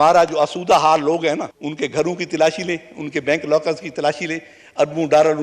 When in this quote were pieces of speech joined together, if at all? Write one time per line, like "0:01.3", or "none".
0:01.6